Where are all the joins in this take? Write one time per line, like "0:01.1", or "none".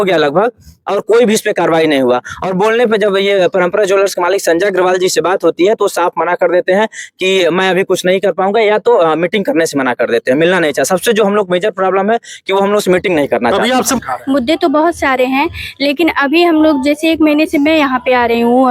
0:14.0

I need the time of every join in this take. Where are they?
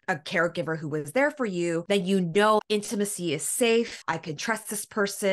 0:01.8
0:02.6
0:04.0

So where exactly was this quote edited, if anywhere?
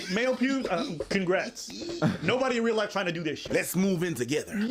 none

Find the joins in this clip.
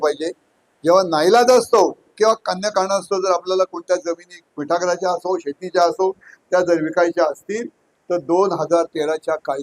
none

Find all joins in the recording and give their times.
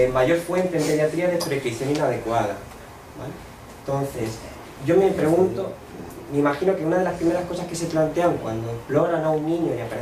0:05.0

